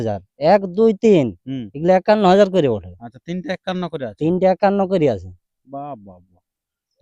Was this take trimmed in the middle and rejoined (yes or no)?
no